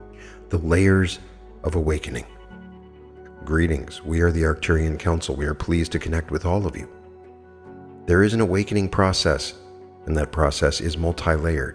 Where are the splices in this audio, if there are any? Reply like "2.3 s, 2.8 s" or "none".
none

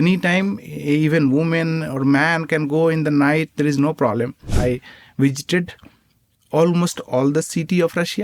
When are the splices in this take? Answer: 4.5 s

